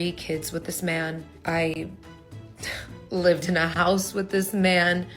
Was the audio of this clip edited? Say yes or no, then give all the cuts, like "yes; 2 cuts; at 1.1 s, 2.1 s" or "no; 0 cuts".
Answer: no; 0 cuts